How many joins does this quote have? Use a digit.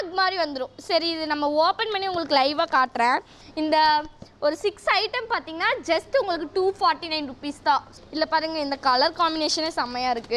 2